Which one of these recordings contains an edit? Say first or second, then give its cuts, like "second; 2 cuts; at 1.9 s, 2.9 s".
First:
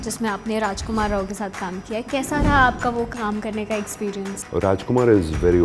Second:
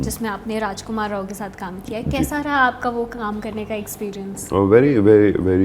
first; 1 cut; at 4.4 s